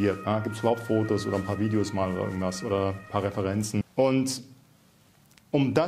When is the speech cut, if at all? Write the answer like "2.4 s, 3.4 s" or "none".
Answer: 3.9 s